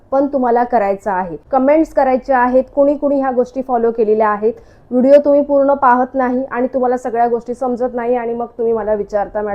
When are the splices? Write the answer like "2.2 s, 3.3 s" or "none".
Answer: 1.4 s